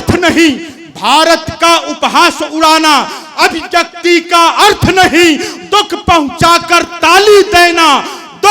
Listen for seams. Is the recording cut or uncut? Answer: uncut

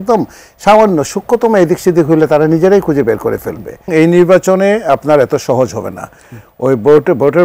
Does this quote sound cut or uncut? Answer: cut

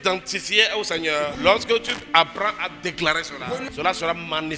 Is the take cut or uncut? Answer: cut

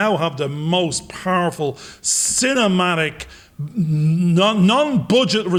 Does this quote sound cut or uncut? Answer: uncut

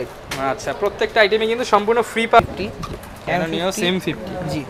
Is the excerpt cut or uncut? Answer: cut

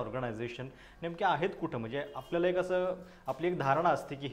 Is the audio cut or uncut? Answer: uncut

